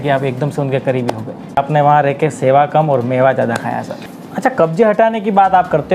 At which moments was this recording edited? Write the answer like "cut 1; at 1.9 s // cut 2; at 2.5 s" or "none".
cut 1; at 1.6 s // cut 2; at 4.3 s